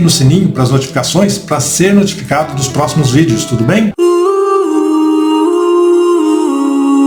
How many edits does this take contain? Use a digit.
0